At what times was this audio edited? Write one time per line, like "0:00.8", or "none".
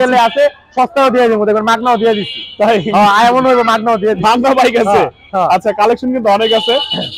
none